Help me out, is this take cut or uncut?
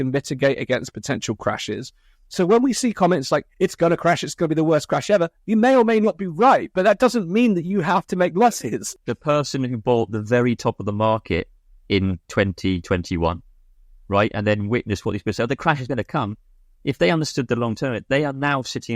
cut